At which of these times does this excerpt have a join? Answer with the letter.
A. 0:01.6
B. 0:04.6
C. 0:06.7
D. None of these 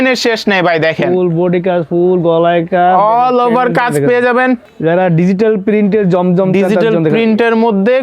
B